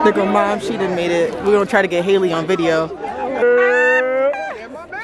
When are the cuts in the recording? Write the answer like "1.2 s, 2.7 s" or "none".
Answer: 3.4 s